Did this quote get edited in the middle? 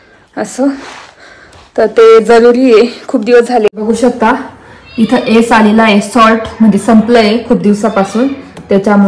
yes; 1 cut; at 3.7 s

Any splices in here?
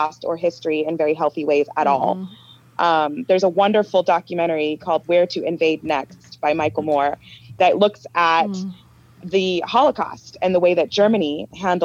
no; 0 cuts

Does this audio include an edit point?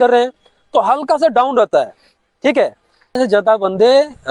yes; 1 cut; at 3.2 s

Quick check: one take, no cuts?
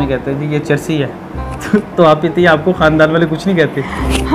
yes; 0 cuts

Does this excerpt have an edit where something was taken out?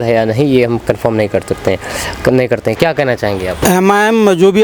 yes; 1 cut; at 3.6 s

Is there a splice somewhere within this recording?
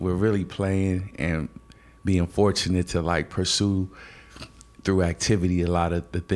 no; 0 cuts

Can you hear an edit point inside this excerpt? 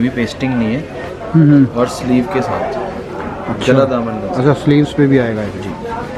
no; 0 cuts

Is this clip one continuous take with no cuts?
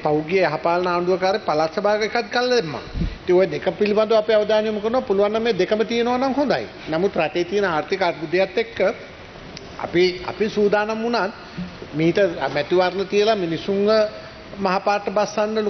yes; 0 cuts

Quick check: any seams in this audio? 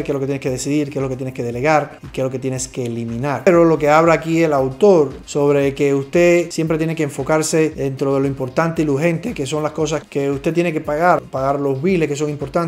no; 0 cuts

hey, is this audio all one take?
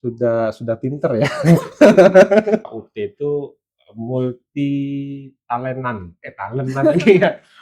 no; 1 cut; at 2.6 s

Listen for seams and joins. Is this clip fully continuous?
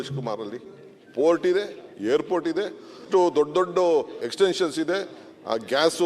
no; 2 cuts; at 2.9 s, 4.2 s

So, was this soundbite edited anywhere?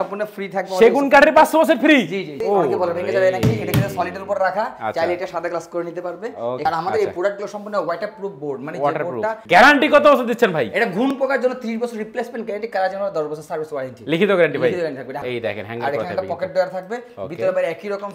yes; 4 cuts; at 2.3 s, 6.6 s, 9.4 s, 15.2 s

